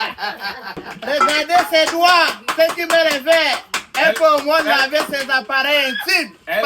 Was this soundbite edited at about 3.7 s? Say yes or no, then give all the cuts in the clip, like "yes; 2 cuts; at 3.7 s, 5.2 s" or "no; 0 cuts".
no; 1 cut; at 0.9 s